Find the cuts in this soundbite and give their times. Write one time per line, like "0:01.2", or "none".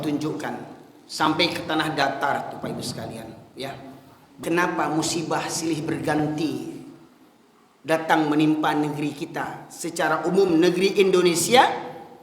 0:04.4

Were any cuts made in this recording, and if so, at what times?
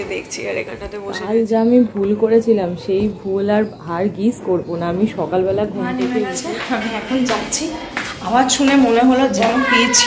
0:01.1
0:06.2

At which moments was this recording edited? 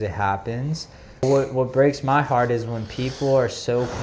0:01.2

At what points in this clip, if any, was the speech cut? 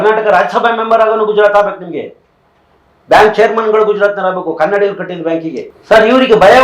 0:05.7

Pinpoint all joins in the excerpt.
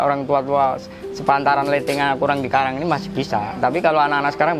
none

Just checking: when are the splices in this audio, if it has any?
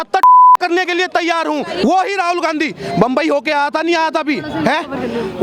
0:01.8

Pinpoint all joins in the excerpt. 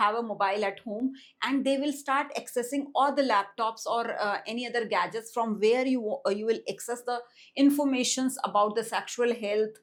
none

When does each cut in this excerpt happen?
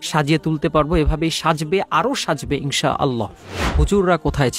0:03.6

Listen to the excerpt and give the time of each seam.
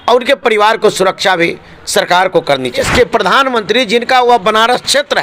0:02.9

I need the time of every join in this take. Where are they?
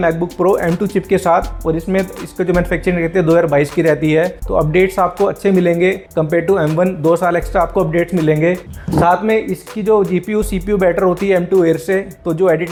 none

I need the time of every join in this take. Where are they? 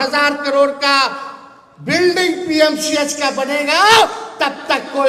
none

